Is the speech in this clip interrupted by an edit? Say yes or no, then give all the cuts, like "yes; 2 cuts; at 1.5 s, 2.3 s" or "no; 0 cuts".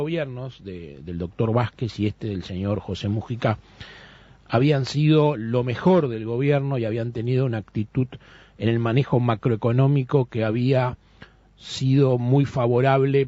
no; 0 cuts